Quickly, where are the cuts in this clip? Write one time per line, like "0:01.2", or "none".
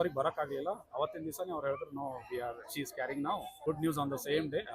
0:03.6